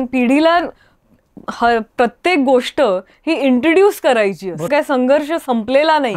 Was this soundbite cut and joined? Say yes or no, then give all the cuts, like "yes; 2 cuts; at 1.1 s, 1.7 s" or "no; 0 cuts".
yes; 1 cut; at 4.7 s